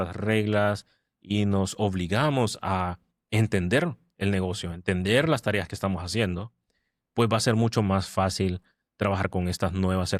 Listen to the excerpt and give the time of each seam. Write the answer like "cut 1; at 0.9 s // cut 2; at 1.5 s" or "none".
none